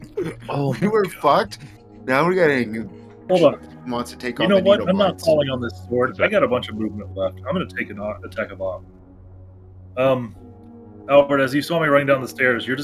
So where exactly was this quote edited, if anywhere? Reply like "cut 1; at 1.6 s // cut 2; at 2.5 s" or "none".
cut 1; at 3.2 s